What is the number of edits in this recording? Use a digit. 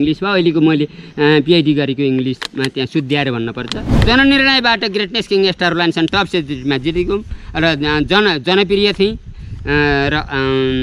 1